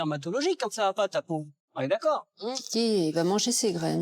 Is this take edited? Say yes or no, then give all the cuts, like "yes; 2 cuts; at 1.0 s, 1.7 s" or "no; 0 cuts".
yes; 1 cut; at 2.6 s